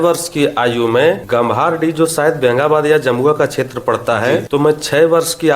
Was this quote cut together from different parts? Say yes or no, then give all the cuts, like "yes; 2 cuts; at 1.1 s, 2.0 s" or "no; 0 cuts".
yes; 2 cuts; at 1.2 s, 4.5 s